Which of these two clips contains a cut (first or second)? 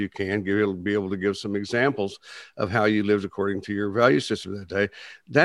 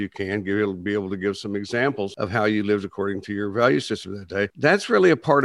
second